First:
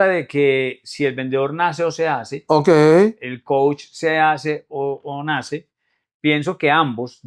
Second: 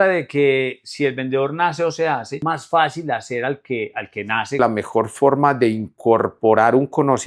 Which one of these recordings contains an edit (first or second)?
second